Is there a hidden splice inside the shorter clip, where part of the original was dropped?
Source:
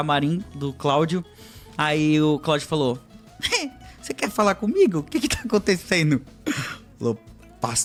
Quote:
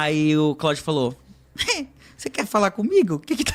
no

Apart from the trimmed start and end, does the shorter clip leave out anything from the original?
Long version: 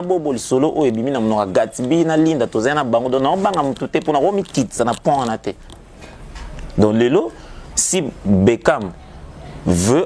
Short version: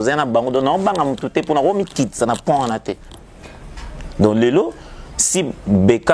no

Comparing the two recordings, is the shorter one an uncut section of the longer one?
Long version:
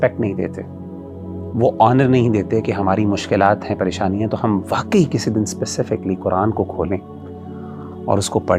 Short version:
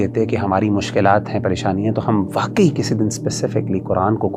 yes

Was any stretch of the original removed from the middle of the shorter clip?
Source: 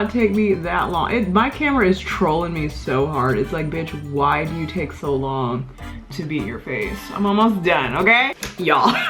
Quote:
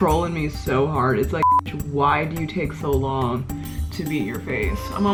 no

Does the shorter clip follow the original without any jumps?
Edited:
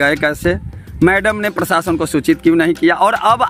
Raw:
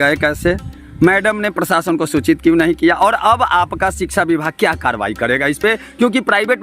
yes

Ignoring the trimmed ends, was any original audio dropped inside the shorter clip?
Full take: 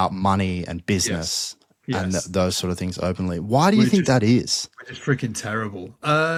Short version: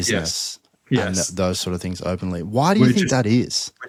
no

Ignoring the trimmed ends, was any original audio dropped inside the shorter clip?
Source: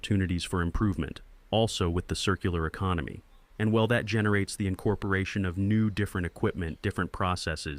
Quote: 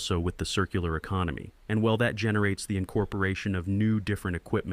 yes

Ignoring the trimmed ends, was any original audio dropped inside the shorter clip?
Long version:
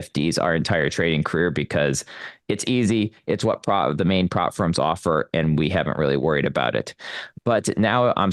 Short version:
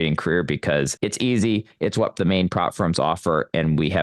yes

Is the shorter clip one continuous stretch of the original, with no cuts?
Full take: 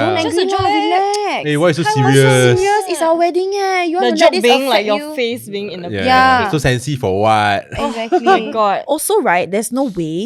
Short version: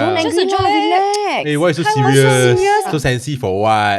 no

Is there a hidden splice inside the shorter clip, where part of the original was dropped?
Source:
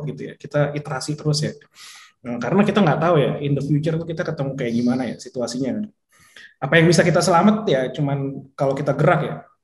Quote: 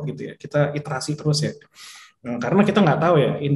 no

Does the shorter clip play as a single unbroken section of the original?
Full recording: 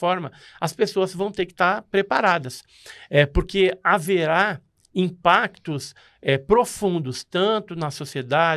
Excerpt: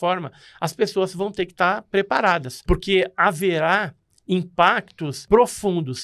no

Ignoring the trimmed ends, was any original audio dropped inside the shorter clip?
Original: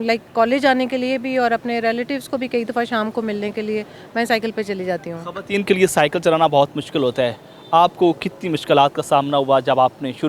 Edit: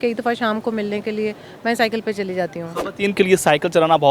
no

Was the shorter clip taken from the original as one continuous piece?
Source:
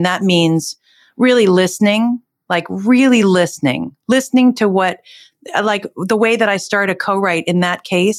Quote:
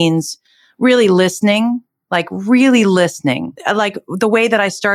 no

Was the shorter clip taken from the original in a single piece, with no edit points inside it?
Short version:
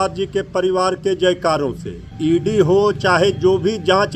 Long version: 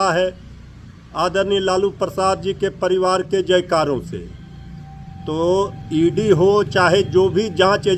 no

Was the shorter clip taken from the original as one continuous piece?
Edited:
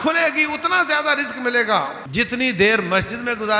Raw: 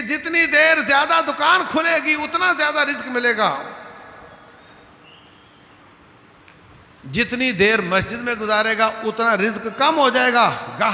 no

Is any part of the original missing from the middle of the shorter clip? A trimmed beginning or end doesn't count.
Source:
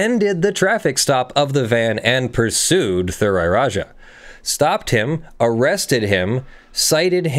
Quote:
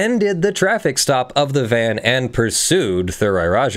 no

